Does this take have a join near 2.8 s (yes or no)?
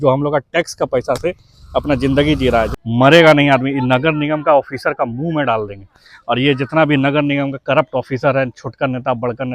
yes